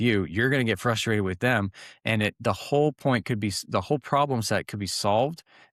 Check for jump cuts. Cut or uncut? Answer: uncut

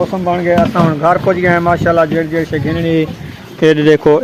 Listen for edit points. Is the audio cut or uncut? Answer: uncut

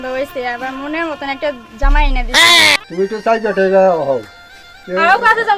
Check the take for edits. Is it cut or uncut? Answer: cut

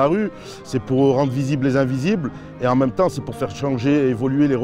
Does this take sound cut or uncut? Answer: uncut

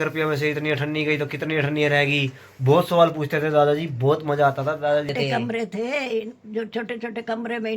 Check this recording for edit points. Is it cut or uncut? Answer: cut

